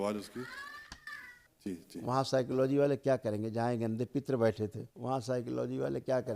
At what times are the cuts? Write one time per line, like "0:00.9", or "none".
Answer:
0:01.4
0:04.9